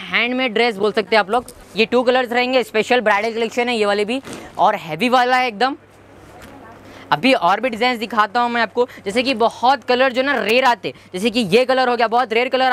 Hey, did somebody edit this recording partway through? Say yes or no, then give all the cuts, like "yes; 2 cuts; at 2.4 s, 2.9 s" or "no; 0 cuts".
no; 0 cuts